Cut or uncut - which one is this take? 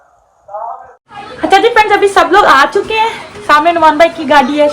cut